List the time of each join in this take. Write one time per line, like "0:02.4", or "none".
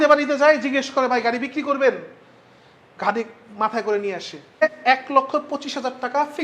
0:04.6